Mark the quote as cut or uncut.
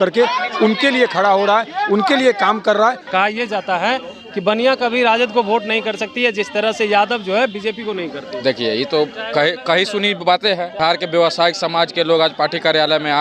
cut